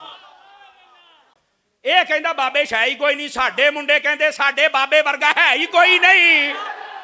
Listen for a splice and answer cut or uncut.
cut